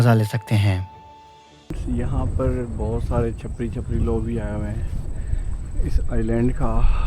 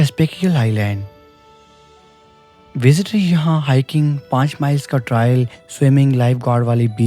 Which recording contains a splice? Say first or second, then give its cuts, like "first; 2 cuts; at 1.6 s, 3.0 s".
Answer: first; 1 cut; at 1.8 s